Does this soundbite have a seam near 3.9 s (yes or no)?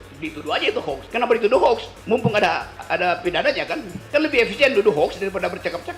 yes